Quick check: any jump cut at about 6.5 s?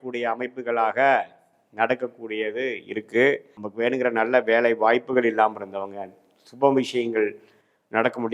no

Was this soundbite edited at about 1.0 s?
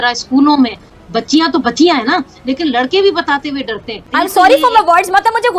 yes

